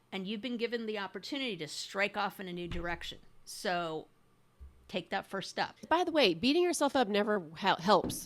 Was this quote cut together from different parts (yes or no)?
yes